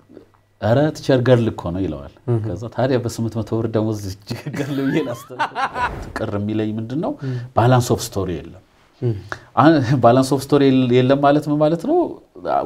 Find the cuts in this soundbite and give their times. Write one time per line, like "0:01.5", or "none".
0:06.0